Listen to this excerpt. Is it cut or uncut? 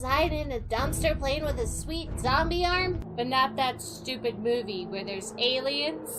cut